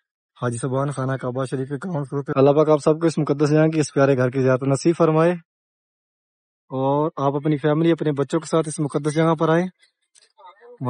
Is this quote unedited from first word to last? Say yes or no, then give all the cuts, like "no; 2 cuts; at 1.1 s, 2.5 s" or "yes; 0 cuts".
no; 1 cut; at 2.3 s